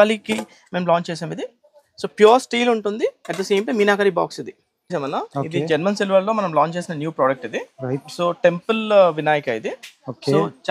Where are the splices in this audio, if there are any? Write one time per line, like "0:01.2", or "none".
0:04.9